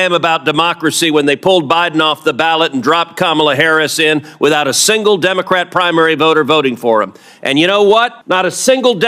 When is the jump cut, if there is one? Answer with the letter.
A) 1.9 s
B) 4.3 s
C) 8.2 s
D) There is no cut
C